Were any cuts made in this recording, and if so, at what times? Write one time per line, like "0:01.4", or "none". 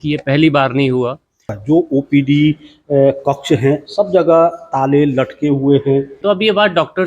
0:01.5
0:06.1